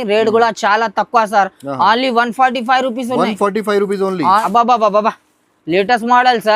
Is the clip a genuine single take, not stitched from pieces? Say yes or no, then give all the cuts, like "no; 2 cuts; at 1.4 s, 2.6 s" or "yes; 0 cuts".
no; 1 cut; at 4.4 s